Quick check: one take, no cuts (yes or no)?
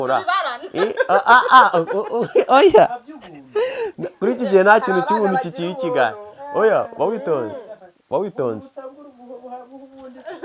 yes